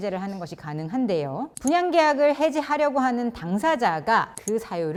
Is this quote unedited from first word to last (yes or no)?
yes